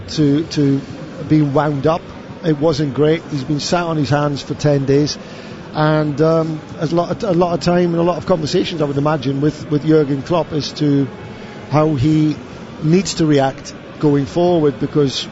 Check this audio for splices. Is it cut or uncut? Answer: uncut